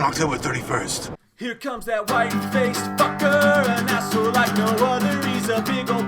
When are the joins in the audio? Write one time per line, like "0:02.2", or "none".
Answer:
0:01.3